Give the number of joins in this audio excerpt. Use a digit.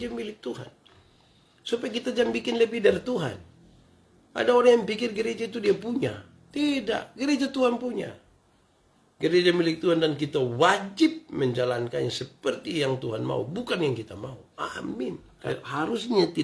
1